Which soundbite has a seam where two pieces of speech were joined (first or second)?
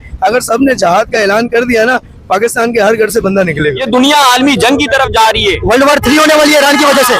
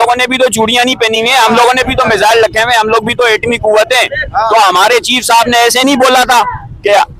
first